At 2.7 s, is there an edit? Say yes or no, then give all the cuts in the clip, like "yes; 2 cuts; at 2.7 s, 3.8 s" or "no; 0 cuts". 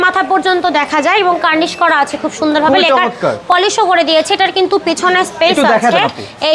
no; 0 cuts